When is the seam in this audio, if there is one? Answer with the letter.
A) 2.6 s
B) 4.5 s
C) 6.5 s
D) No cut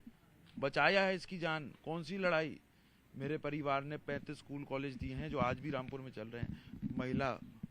D